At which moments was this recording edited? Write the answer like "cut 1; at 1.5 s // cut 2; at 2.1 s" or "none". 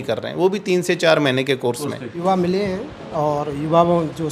cut 1; at 2.2 s